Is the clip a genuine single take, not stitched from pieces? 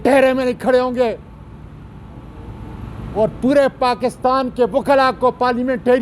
yes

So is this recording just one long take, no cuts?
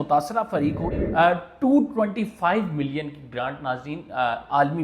no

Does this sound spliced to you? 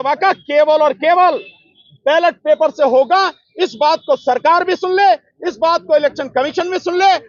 no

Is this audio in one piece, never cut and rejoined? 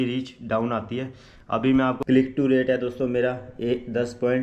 no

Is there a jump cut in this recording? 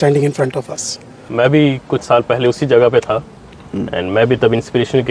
yes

